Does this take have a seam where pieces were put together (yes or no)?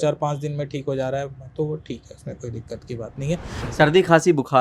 yes